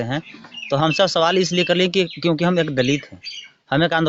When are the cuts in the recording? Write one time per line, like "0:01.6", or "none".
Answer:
none

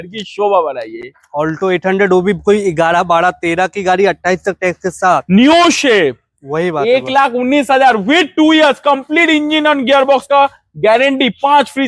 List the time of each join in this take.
none

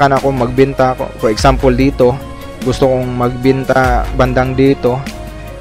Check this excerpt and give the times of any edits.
none

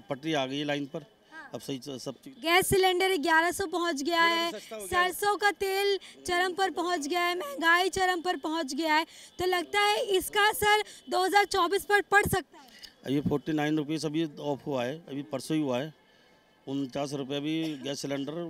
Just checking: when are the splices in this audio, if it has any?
none

